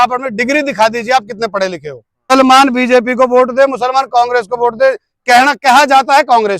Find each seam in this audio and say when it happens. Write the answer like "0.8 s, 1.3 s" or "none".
2.3 s